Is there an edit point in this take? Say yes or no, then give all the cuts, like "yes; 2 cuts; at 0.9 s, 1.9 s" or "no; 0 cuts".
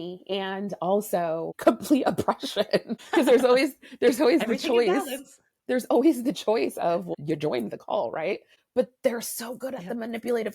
yes; 4 cuts; at 1.5 s, 3.0 s, 7.1 s, 8.5 s